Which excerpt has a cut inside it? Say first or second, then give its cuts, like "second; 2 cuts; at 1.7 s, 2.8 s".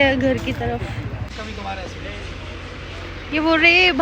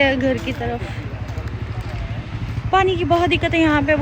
first; 1 cut; at 1.3 s